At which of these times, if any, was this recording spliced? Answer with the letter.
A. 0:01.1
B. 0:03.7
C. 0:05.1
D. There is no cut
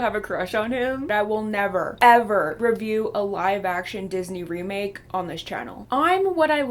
A